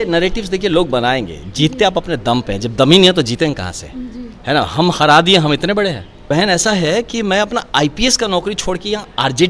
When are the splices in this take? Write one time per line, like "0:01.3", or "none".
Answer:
0:06.1

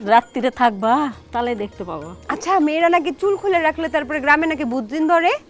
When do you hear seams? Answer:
0:01.2
0:02.1

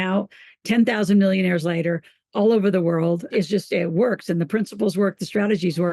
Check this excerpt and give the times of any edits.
0:03.3

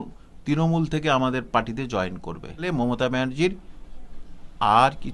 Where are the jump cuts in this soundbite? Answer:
0:02.6

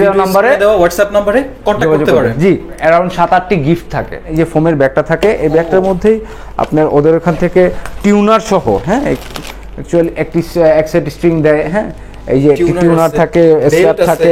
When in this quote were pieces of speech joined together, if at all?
0:02.8
0:04.3

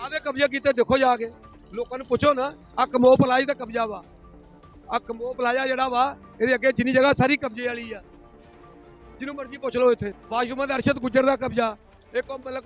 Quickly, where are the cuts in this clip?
0:10.1

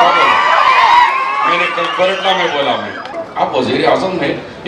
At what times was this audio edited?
0:03.2

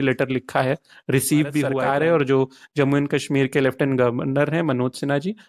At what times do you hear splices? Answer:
0:01.8

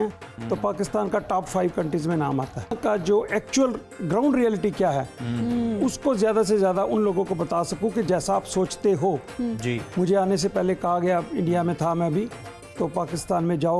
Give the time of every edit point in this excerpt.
0:02.8

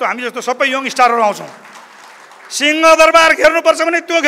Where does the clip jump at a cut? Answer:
none

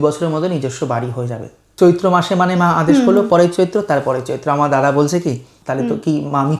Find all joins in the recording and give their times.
0:01.6
0:05.5

